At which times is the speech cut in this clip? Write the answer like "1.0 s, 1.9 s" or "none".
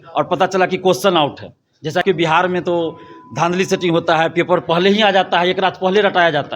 2.0 s